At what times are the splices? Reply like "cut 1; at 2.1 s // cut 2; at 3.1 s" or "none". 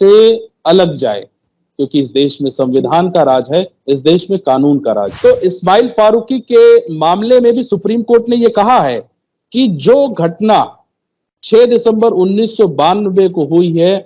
cut 1; at 5.1 s